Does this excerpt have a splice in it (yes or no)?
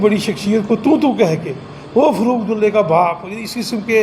no